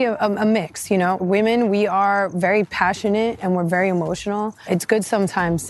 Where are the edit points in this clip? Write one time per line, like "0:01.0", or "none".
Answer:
0:01.2
0:04.6